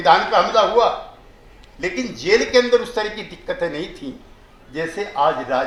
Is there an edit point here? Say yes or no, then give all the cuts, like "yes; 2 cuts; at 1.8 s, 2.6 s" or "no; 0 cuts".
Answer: no; 0 cuts